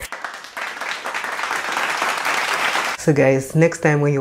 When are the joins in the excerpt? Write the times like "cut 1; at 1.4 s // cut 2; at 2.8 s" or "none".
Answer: cut 1; at 2.8 s